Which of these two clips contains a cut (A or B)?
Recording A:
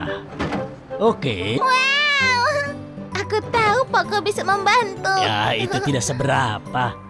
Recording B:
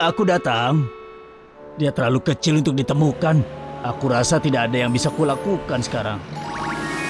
A